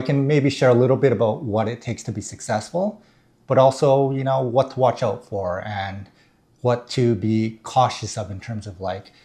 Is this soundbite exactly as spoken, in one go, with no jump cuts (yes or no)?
yes